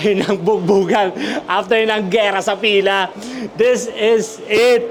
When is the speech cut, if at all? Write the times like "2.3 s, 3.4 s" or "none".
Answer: none